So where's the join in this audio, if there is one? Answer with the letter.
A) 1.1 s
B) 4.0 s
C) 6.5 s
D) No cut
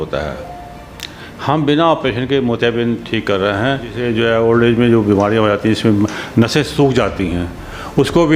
B